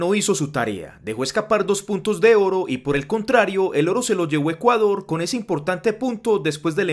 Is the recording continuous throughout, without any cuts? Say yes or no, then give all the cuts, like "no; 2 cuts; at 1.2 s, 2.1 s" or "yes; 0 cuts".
yes; 0 cuts